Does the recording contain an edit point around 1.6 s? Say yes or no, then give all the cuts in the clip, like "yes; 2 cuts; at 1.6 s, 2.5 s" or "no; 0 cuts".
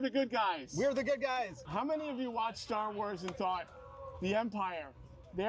yes; 1 cut; at 1.6 s